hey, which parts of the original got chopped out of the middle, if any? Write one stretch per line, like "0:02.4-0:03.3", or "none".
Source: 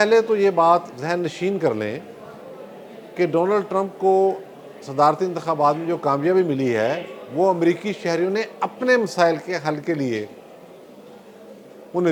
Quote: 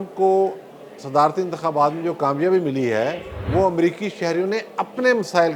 none

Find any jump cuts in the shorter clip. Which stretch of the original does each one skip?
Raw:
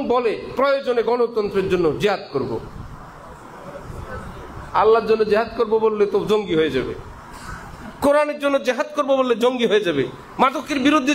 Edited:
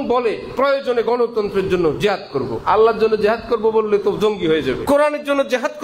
0:02.6-0:04.7
0:06.9-0:08.0

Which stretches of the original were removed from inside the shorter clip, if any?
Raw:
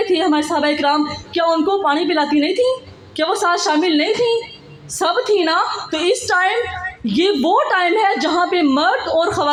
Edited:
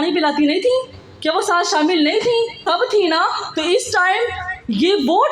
0:04.5-0:04.9

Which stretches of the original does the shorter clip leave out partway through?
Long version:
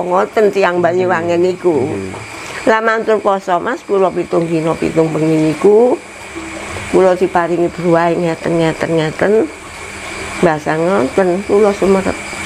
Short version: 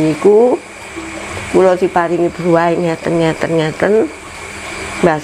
none

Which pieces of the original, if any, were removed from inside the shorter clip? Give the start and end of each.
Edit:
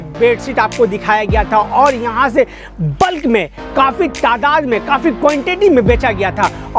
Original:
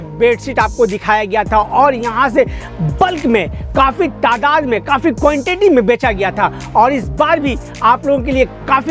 none

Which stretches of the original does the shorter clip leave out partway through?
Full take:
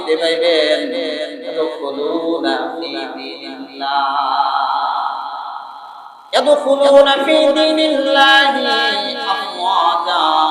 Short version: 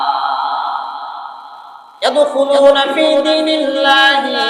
none

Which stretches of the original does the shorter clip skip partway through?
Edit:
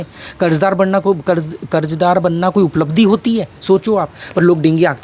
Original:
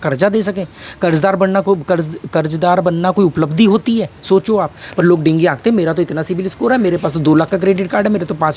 none

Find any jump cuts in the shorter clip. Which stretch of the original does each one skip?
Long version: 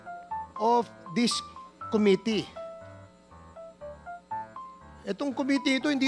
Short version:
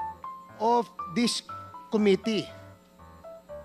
0:02.5-0:02.8

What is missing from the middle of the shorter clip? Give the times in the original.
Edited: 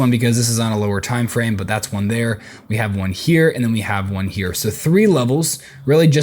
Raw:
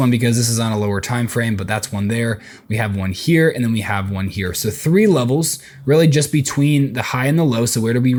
none

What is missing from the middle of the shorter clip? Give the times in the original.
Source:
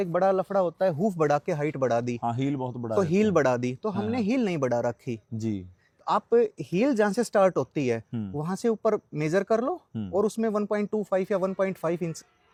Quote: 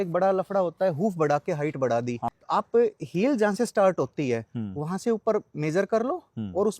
0:02.3-0:05.9

